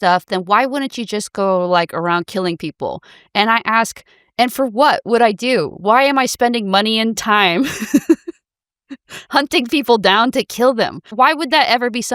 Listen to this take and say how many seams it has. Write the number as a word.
one